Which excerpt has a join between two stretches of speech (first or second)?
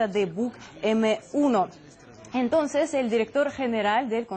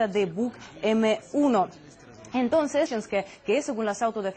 first